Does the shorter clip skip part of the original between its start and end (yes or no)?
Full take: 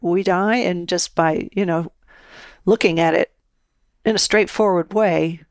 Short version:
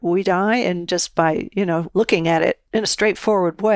yes